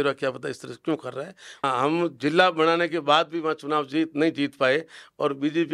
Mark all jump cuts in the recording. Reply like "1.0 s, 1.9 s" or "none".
1.5 s